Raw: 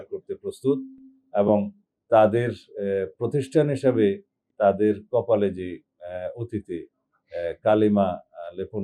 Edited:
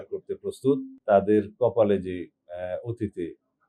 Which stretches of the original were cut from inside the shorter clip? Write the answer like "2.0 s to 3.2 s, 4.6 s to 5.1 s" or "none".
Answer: 0.9 s to 4.4 s